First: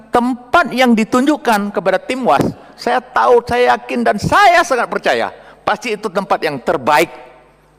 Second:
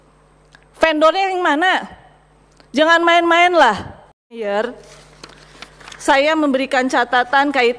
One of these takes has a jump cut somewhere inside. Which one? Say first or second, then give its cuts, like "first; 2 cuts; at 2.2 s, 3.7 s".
second; 1 cut; at 4.4 s